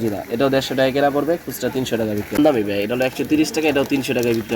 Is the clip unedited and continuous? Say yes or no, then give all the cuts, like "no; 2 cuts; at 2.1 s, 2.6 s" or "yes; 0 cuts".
no; 1 cut; at 2.4 s